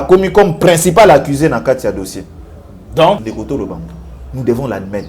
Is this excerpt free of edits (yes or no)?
no